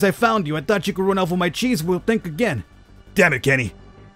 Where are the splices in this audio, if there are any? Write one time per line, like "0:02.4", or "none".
none